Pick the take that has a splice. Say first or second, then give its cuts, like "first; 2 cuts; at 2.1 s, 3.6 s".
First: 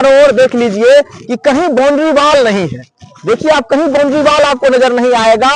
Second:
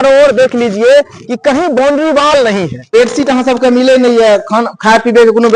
second; 1 cut; at 2.9 s